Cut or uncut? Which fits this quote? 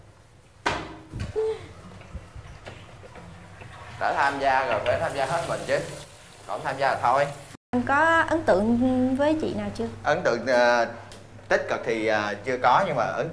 cut